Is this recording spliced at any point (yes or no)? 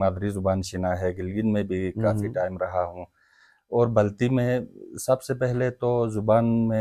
no